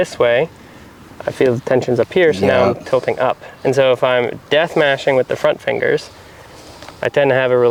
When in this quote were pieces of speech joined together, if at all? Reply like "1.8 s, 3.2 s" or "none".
none